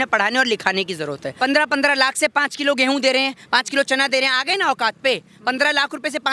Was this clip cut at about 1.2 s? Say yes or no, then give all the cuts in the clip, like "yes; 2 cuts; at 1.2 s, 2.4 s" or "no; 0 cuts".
yes; 1 cut; at 1.2 s